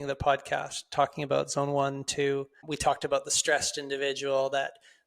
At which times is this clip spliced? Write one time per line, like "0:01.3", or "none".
0:02.6